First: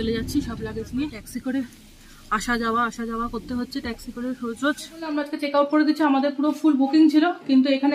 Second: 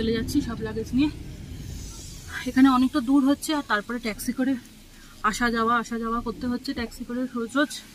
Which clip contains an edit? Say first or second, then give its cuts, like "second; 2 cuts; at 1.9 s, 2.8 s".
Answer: first; 2 cuts; at 1.2 s, 5.3 s